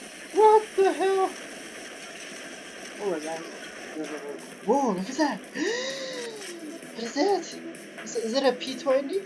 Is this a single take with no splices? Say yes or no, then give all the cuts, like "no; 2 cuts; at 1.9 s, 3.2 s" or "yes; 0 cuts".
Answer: no; 1 cut; at 4.0 s